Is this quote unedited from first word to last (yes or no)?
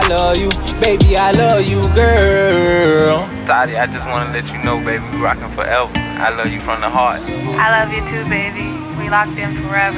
yes